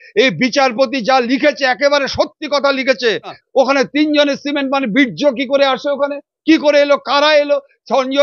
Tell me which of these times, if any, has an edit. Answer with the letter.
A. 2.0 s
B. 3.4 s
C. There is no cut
B